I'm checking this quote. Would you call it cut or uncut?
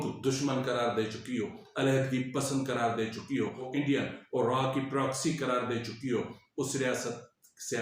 cut